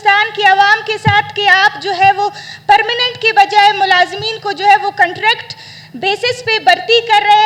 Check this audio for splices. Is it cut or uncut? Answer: uncut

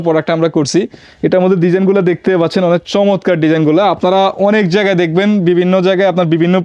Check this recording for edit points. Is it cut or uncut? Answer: uncut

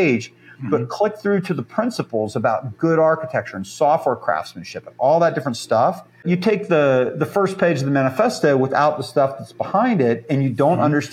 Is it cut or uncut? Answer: cut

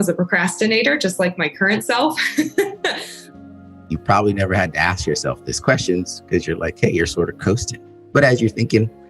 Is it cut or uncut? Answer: cut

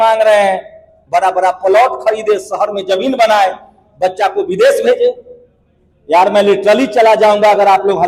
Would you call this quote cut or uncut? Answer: cut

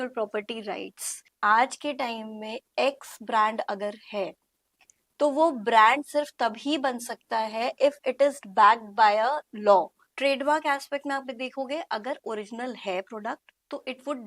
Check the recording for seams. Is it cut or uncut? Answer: cut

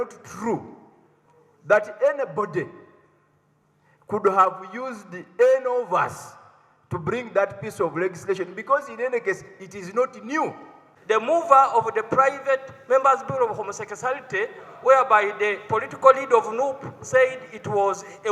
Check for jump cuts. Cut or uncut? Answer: cut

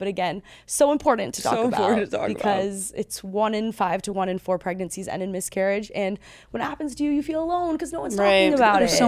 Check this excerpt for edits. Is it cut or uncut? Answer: uncut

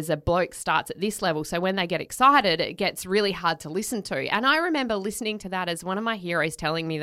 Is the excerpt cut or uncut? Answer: uncut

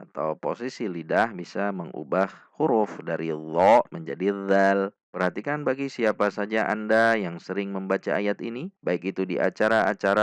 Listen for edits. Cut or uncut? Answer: cut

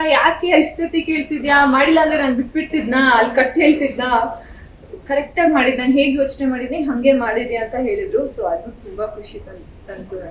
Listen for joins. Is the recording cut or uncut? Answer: uncut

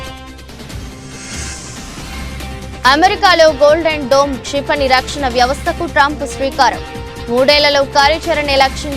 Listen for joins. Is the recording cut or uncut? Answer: cut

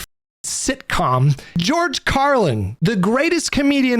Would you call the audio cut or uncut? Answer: cut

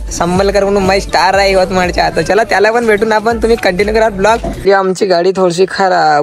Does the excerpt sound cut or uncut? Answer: cut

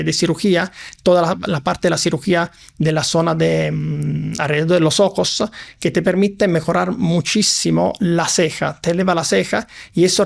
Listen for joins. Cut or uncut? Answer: uncut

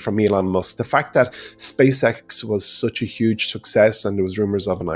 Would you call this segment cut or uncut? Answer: uncut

